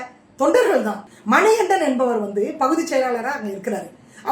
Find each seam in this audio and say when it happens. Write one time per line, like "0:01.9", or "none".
0:01.1